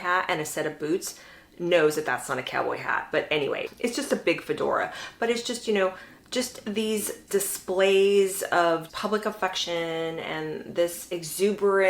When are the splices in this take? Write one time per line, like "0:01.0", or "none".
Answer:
0:07.2
0:08.9